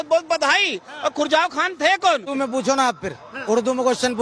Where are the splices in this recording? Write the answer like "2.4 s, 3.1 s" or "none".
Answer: 2.3 s